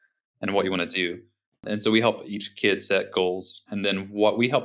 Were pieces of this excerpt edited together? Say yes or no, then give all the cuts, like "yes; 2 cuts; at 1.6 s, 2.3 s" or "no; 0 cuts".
yes; 3 cuts; at 1.6 s, 2.4 s, 3.7 s